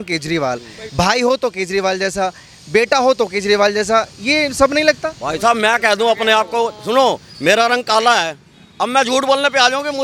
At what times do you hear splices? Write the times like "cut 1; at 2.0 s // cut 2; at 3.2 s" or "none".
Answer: none